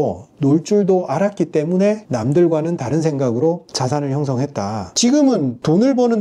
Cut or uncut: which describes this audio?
cut